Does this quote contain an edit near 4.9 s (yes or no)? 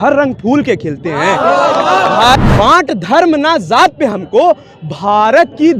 no